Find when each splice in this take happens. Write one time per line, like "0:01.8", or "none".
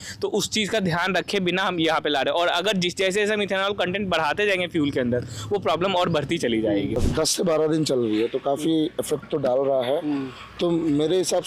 0:07.1